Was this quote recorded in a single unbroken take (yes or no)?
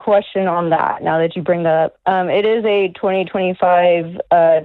yes